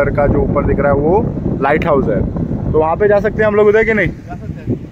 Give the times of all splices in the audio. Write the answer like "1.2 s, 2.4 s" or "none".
none